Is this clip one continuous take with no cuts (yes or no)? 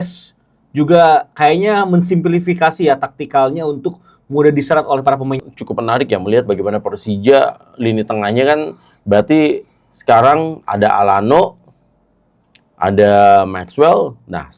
no